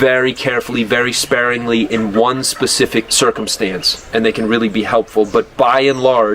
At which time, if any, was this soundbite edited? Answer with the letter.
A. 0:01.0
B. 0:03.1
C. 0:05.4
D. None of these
B